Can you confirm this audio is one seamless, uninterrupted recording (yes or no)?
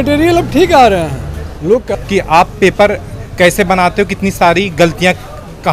no